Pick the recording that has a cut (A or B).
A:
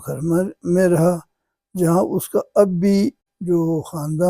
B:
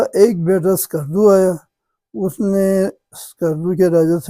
A